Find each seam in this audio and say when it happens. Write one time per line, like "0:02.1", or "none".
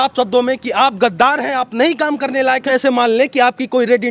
0:02.7